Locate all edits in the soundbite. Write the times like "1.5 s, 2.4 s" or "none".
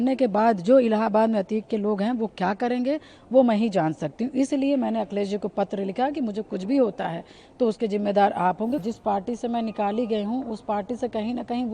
8.8 s